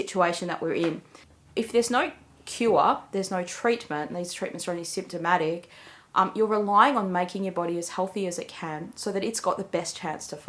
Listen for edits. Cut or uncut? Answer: cut